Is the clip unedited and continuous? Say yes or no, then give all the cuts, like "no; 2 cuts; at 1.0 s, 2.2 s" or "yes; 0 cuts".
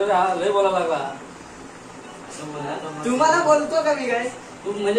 yes; 0 cuts